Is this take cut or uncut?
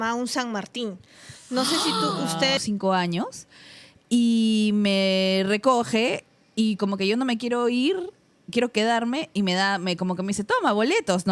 cut